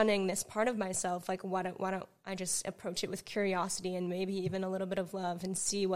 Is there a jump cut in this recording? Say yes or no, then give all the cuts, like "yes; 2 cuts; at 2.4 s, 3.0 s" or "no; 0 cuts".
no; 0 cuts